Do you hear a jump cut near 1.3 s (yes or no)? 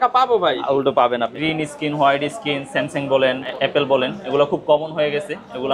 yes